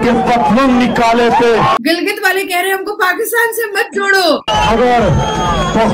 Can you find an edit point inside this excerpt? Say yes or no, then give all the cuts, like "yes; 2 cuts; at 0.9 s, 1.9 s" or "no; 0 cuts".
yes; 2 cuts; at 1.8 s, 4.5 s